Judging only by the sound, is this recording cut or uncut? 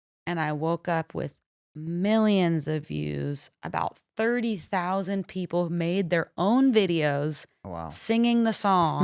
uncut